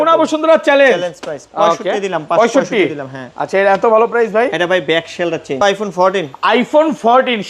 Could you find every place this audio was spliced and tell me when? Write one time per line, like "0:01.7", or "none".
0:05.6